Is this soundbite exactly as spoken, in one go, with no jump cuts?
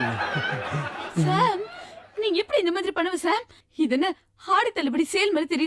yes; 0 cuts

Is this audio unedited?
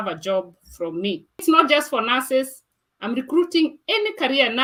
yes; 0 cuts

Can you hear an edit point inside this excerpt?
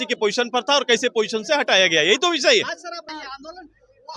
yes; 1 cut; at 3.1 s

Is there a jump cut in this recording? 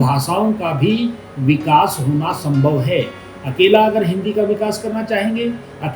no; 0 cuts

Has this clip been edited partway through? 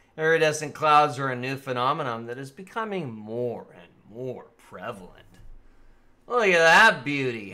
yes; 1 cut; at 5.1 s

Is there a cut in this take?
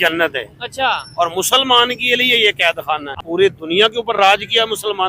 yes; 1 cut; at 3.1 s

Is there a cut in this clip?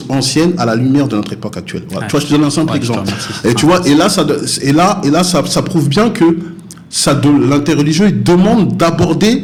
no; 0 cuts

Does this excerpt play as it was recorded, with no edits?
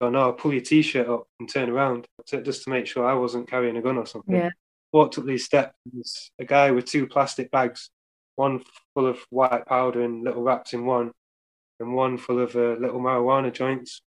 no; 1 cut; at 2.2 s

